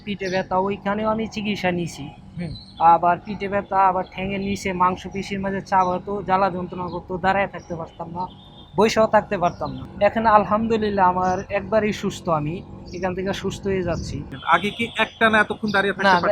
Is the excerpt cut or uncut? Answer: cut